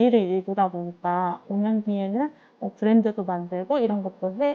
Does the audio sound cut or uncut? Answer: uncut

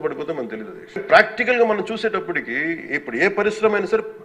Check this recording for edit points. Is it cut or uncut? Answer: cut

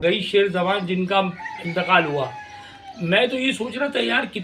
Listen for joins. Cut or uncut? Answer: uncut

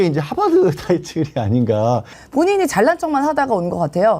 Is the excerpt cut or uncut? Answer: cut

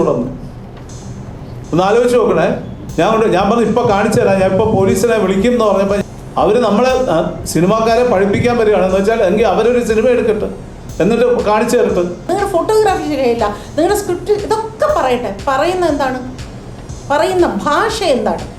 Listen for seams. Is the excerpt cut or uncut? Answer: cut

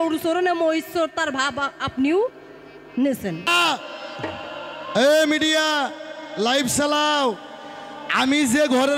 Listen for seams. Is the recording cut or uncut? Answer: cut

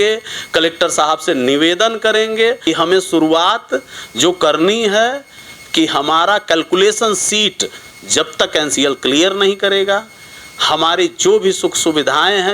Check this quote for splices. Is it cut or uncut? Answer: cut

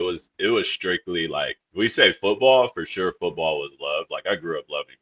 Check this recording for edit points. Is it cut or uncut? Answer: uncut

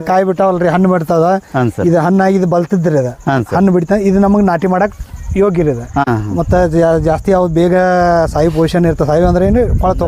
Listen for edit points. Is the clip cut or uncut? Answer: cut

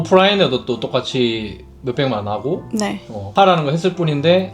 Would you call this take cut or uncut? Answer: cut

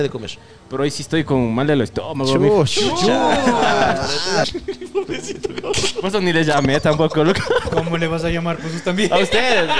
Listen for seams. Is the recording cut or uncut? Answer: cut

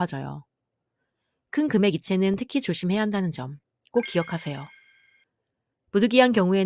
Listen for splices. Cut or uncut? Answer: uncut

